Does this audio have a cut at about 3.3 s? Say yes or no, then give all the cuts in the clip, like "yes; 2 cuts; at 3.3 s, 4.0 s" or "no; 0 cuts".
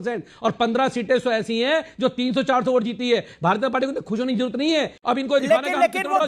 no; 1 cut; at 5.0 s